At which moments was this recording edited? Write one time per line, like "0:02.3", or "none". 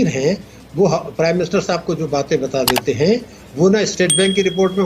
none